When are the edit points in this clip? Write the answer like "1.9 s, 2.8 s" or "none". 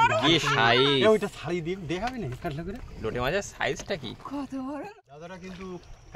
4.8 s